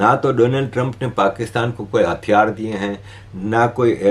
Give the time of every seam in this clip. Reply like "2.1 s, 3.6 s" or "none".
none